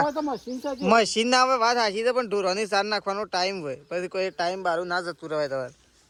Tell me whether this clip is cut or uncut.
uncut